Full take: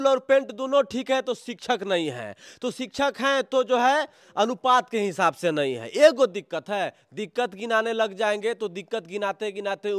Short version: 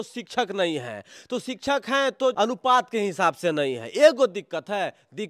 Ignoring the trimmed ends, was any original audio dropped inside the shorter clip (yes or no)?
yes